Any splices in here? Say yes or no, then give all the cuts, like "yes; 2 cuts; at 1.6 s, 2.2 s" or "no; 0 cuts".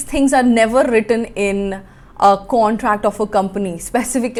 no; 0 cuts